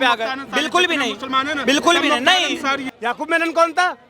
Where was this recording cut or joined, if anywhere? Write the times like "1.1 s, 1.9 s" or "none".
2.9 s